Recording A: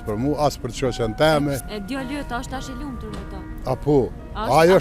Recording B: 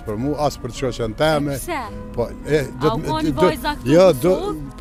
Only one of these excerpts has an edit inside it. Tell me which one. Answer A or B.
A